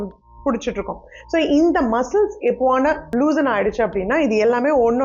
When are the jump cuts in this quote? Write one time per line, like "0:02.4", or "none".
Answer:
0:03.1